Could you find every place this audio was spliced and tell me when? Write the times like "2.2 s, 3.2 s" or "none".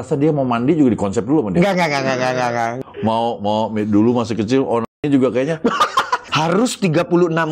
2.8 s, 6.2 s